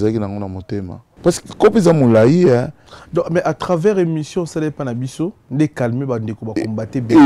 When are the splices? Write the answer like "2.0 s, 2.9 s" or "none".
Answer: 1.1 s, 5.4 s

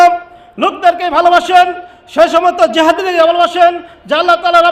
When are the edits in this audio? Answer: none

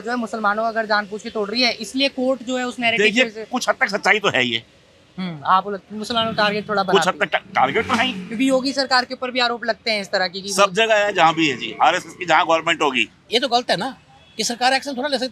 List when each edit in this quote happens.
13.2 s

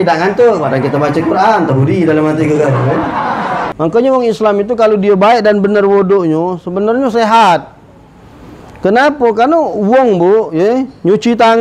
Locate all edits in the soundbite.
3.7 s

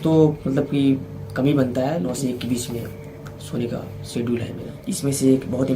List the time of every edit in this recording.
2.1 s, 4.6 s

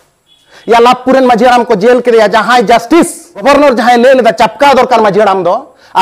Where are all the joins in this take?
3.4 s

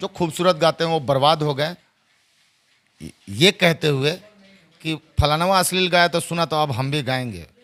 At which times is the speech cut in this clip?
none

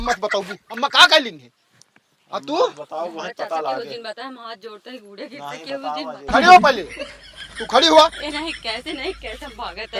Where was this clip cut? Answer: none

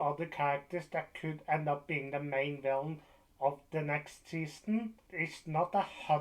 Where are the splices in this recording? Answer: 5.0 s

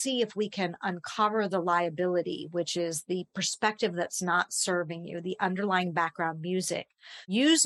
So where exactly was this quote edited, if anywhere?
none

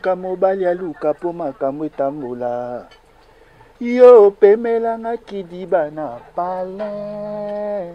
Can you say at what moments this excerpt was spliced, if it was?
none

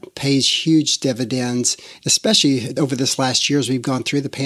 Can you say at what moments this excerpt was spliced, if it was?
2.7 s

